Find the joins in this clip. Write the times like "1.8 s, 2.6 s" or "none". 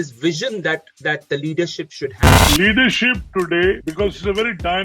2.4 s, 3.8 s